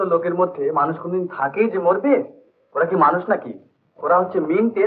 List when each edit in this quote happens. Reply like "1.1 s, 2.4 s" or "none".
none